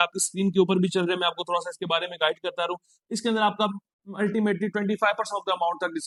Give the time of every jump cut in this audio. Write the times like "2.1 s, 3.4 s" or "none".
none